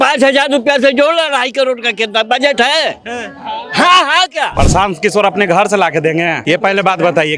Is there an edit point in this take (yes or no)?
yes